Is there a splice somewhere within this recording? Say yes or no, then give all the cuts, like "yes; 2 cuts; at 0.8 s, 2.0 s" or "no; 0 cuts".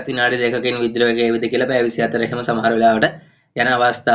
no; 0 cuts